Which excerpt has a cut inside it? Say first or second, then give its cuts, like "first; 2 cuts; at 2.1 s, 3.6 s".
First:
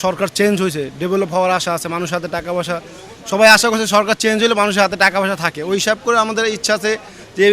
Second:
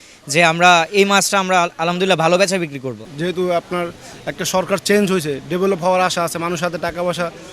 second; 1 cut; at 3.1 s